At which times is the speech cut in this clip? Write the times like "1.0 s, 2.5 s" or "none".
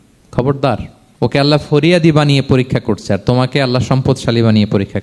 1.0 s